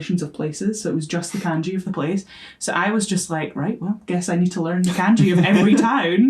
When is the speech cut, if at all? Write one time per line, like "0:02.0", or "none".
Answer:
none